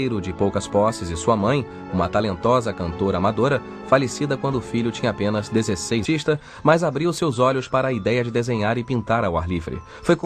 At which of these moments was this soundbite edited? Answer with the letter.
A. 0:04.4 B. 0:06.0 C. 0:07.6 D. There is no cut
D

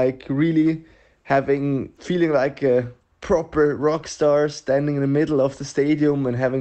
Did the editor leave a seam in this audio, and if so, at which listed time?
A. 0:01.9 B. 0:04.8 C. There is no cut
A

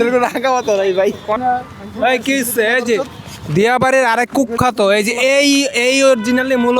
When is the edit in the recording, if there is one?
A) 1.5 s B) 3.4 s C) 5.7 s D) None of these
A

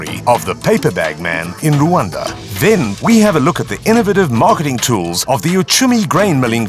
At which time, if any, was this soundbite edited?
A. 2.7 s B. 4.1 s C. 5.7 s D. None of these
A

